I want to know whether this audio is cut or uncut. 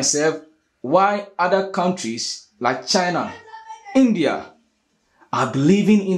uncut